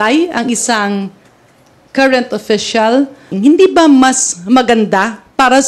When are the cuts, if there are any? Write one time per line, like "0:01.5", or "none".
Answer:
0:03.3